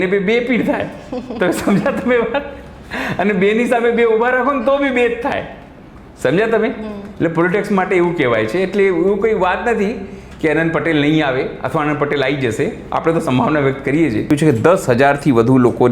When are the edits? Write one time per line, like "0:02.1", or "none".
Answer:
0:14.2